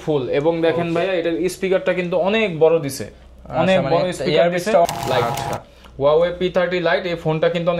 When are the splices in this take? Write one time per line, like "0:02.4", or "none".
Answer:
0:04.9